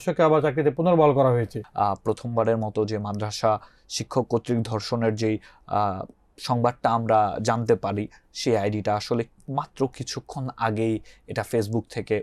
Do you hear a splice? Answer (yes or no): yes